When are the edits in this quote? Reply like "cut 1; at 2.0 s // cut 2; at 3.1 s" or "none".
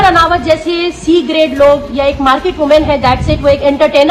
none